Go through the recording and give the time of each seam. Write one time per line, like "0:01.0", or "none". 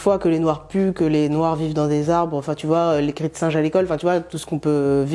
none